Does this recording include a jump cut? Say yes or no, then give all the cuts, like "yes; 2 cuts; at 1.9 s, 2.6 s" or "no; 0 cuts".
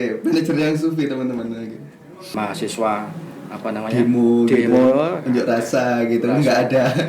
yes; 1 cut; at 2.1 s